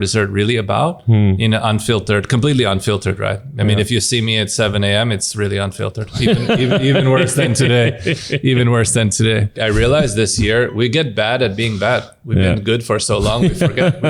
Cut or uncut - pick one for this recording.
cut